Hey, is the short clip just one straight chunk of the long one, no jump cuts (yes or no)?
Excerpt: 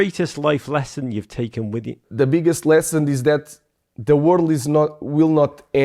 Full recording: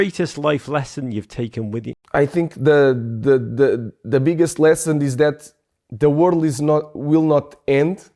no